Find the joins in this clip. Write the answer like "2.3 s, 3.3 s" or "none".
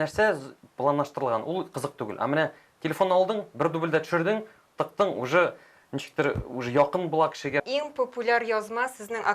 7.7 s